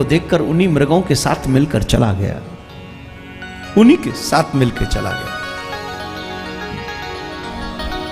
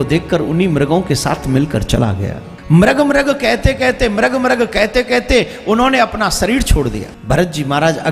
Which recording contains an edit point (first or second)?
second